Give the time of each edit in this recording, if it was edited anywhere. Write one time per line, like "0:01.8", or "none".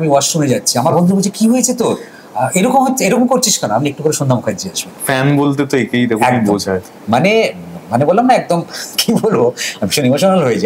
none